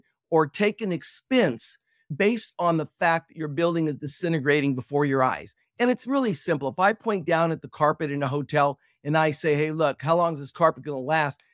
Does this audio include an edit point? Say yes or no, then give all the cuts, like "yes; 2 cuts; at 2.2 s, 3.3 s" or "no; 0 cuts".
no; 0 cuts